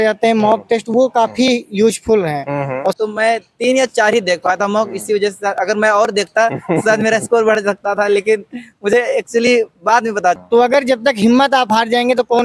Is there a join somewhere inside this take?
yes; 2 cuts; at 3.0 s, 10.4 s

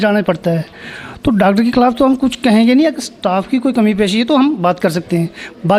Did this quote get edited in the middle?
no; 0 cuts

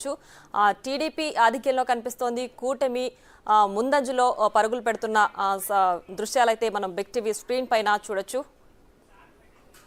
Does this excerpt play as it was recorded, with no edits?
yes; 0 cuts

